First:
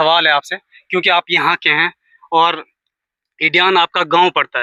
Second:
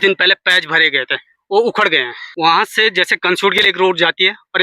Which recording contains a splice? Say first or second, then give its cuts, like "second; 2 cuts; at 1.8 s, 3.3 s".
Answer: second; 1 cut; at 2.2 s